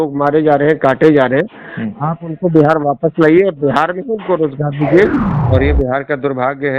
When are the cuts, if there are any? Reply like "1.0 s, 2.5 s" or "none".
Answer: 5.3 s